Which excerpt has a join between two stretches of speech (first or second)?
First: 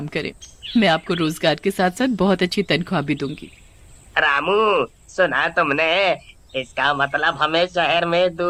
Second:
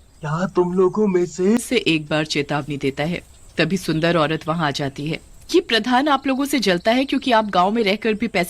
second